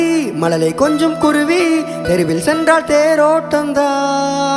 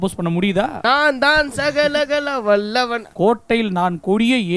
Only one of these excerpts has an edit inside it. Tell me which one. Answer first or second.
second